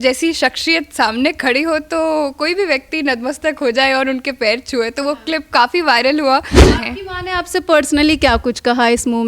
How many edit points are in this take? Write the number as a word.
one